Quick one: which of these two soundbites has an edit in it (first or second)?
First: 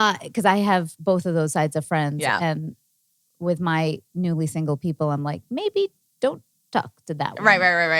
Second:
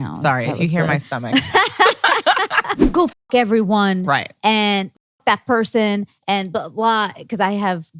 second